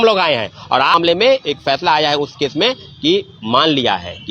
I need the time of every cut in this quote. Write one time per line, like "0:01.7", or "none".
0:00.9